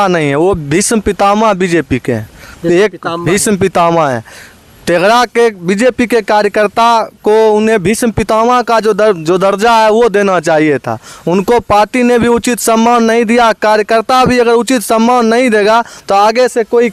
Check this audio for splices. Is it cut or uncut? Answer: uncut